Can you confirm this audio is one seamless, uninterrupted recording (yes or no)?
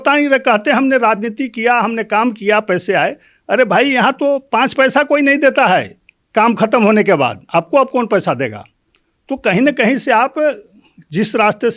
yes